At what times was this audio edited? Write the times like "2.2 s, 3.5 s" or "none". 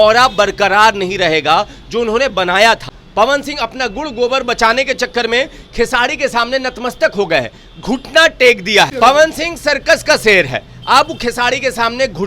3.0 s, 8.9 s